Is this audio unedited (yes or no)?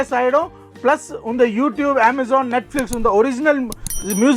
yes